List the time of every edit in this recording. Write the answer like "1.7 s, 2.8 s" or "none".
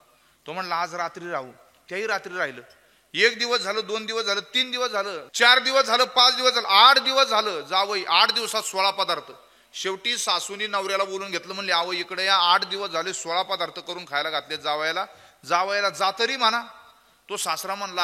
5.3 s